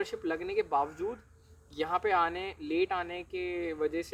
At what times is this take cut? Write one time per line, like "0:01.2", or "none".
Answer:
none

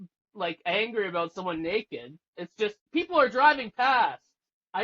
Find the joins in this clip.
0:02.8

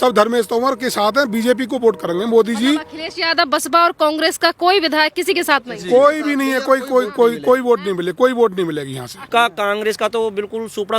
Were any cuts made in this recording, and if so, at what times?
0:09.3

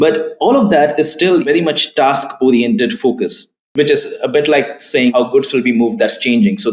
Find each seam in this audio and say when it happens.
0:01.4
0:05.1

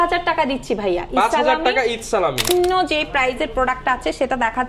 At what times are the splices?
0:02.5

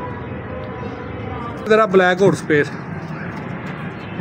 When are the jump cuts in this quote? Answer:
0:01.7

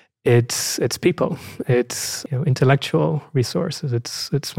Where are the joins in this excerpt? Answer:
0:02.2

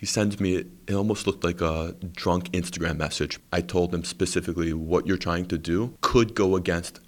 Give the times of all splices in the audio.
0:03.4
0:05.9

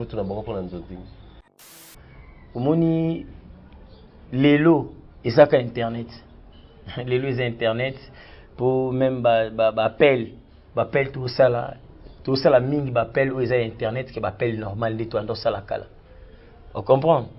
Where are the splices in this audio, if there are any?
0:01.8

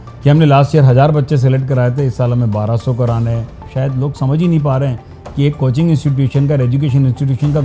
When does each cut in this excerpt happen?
0:03.6

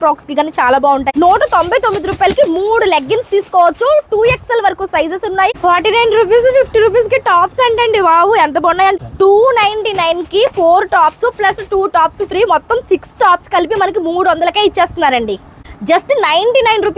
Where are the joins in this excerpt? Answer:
0:01.1
0:05.5
0:08.9
0:15.7

